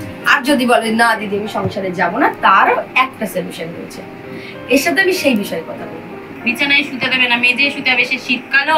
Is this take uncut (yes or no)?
no